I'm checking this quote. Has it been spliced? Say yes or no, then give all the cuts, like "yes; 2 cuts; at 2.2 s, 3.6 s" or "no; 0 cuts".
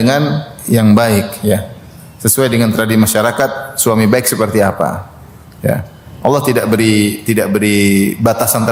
no; 0 cuts